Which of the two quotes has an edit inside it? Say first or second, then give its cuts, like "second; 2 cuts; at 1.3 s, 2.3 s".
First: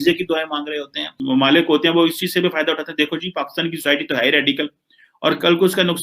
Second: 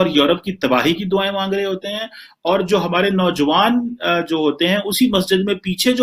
first; 1 cut; at 1.2 s